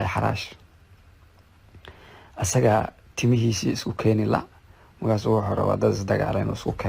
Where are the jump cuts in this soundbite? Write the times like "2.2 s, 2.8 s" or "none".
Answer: none

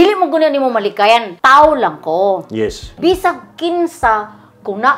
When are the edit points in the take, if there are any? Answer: 1.3 s, 2.8 s

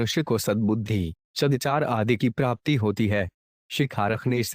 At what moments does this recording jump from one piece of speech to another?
1.6 s, 3.7 s

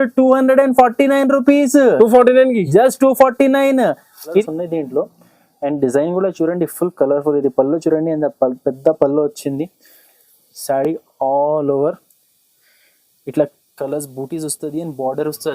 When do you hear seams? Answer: 4.4 s

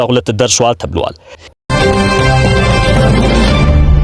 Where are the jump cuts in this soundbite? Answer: 1.6 s

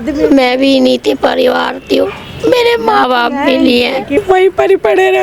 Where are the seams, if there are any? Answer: 4.2 s

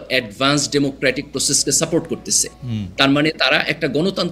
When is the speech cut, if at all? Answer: none

